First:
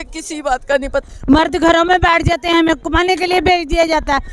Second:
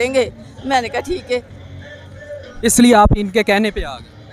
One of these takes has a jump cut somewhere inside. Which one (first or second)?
first